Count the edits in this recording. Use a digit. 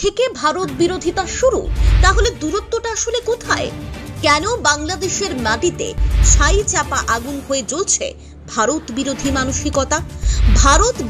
1